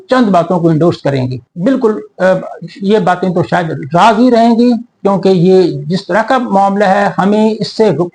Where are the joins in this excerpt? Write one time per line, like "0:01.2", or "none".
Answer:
0:01.5

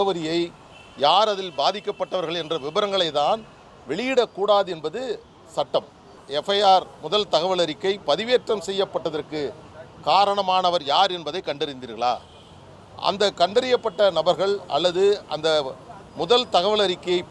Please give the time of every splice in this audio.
0:06.2

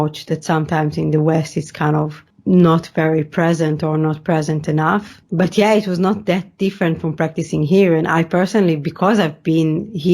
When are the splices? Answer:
0:02.3
0:05.2

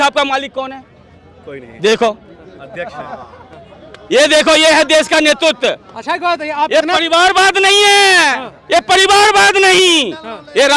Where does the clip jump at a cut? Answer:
none

